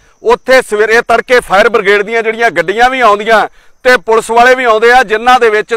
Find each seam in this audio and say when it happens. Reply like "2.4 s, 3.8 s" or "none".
none